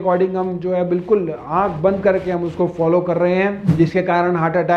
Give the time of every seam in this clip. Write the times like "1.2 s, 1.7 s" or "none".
3.6 s